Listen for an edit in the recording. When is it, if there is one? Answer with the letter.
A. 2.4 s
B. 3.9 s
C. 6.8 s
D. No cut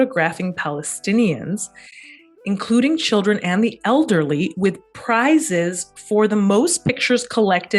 D